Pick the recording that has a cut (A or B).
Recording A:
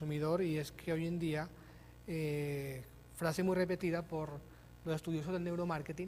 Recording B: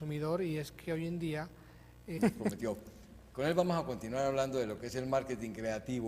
A